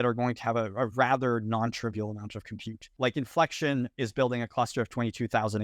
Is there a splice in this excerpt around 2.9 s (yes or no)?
yes